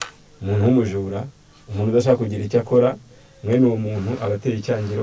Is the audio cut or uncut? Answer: uncut